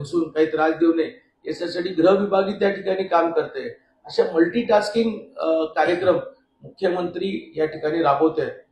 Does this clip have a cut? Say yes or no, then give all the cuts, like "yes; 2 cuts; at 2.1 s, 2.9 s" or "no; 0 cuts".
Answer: no; 0 cuts